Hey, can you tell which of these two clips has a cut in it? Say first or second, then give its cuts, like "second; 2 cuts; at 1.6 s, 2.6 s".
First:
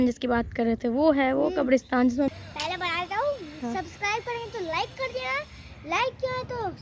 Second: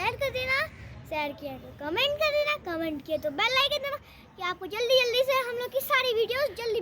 first; 1 cut; at 2.3 s